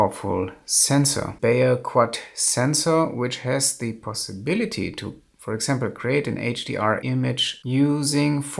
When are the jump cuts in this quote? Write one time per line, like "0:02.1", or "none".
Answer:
0:01.3
0:07.3